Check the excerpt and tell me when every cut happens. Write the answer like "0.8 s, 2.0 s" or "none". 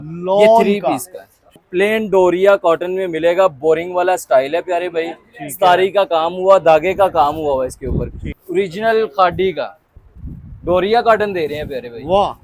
1.6 s, 8.4 s